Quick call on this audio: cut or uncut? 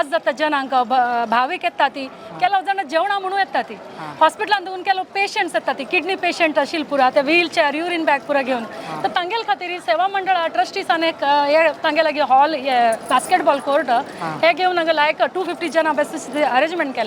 uncut